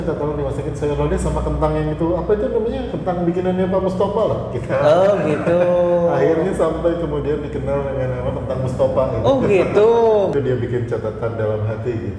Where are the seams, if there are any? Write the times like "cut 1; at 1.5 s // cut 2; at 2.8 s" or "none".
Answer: cut 1; at 10.3 s